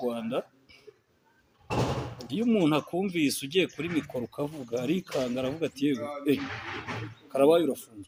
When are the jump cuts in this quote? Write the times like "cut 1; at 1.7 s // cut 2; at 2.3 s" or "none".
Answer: none